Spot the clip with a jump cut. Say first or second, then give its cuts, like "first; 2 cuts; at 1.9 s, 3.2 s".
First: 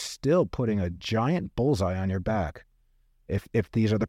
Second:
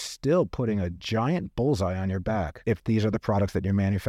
second; 1 cut; at 2.6 s